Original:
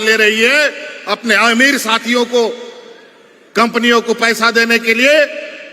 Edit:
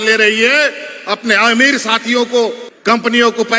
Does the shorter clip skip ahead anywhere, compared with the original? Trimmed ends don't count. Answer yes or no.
yes